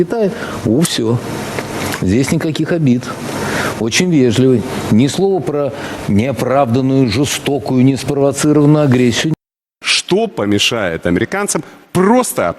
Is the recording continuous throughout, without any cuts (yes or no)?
no